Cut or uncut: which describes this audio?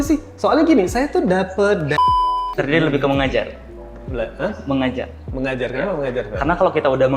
cut